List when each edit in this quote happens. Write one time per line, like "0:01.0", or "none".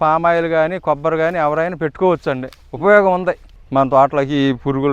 0:03.5